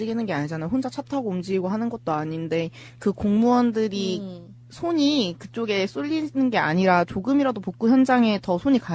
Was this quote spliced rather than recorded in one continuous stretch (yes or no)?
no